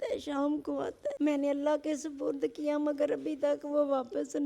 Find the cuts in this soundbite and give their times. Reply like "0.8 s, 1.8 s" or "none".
1.1 s

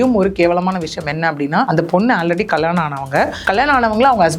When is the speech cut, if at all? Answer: 1.7 s, 3.4 s

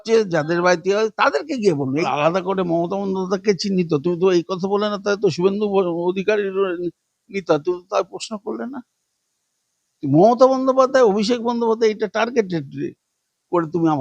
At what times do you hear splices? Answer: 1.7 s

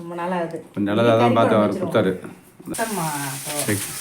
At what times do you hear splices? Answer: 2.7 s

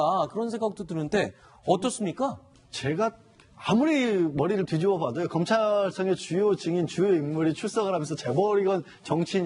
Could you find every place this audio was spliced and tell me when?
3.9 s

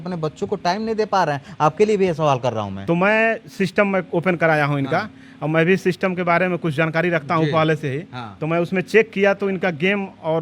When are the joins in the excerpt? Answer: 2.8 s

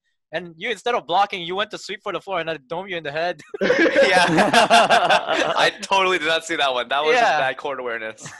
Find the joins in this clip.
none

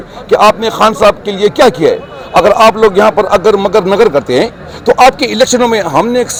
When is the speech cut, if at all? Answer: none

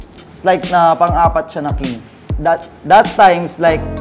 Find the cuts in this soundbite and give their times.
2.2 s

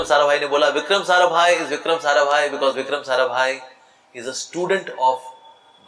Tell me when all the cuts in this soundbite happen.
none

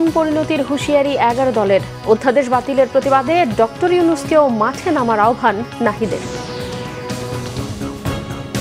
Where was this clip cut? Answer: 7.6 s

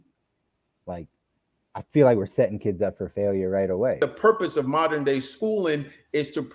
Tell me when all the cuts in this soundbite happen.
4.0 s

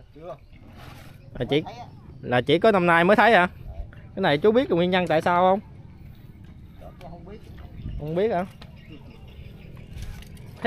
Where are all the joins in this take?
none

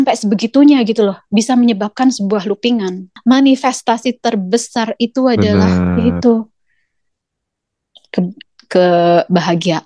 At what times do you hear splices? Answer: 3.0 s

